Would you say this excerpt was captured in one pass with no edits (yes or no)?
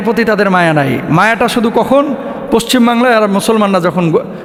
yes